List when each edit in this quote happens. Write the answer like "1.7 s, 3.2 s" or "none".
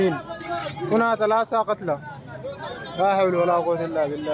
none